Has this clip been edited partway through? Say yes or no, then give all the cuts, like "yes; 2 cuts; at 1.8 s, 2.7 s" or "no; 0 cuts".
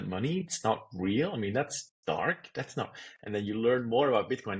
no; 0 cuts